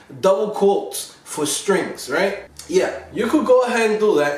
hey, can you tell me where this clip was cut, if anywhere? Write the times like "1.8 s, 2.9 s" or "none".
2.5 s